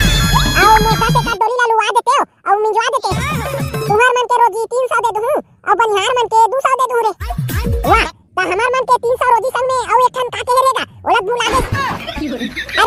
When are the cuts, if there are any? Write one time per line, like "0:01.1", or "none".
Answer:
none